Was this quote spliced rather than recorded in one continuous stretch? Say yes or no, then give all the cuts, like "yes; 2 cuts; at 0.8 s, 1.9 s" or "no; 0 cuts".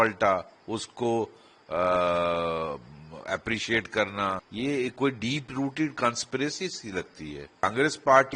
yes; 2 cuts; at 4.5 s, 7.6 s